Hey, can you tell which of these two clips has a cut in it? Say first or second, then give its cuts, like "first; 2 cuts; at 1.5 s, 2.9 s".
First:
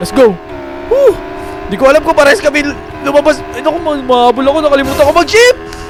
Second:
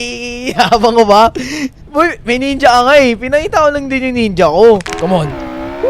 second; 1 cut; at 4.8 s